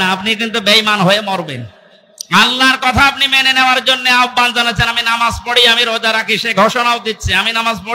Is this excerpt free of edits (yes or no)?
yes